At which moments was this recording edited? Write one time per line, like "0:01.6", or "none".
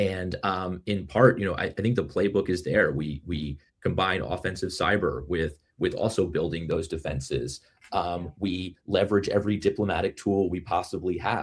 none

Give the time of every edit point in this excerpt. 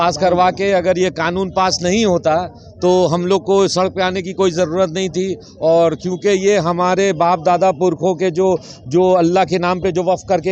none

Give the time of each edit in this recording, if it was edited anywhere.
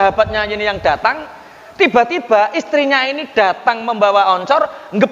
none

